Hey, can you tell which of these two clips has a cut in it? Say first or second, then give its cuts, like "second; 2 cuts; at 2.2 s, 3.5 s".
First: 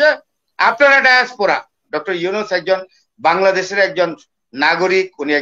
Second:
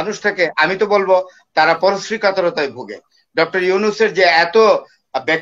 first; 1 cut; at 1.9 s